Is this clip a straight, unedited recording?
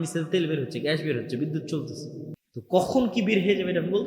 no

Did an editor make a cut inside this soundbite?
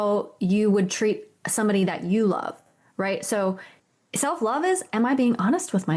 yes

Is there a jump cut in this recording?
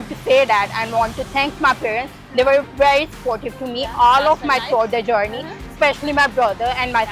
no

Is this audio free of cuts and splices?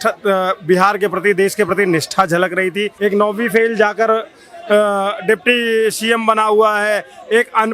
no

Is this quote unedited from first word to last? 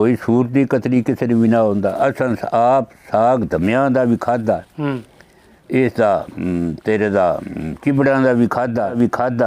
yes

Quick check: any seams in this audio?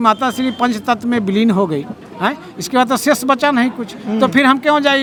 no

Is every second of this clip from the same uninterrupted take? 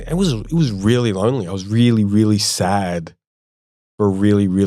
yes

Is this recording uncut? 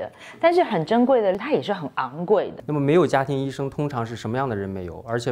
no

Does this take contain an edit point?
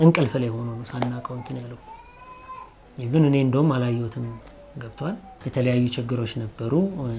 yes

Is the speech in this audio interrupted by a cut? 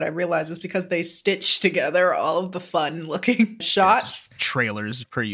yes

